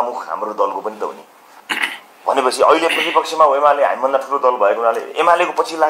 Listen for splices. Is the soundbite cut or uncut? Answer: cut